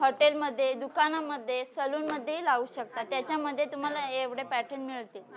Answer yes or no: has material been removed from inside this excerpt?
no